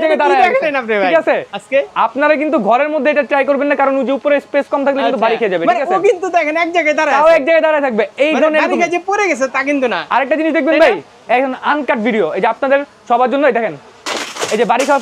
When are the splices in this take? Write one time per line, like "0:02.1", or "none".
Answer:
none